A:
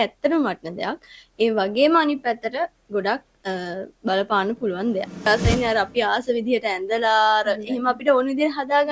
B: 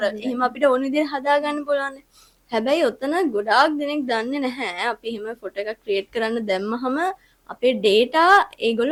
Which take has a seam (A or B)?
A